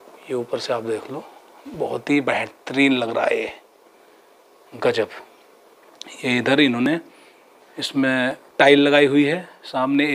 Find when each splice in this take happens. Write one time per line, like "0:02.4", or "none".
none